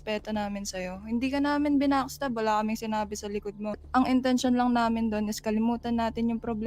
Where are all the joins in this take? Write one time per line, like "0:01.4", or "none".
0:03.8